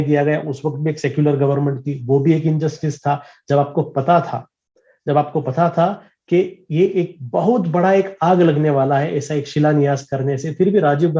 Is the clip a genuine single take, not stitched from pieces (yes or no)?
yes